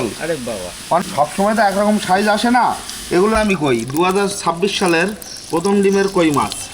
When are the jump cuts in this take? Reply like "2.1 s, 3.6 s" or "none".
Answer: 1.0 s, 3.3 s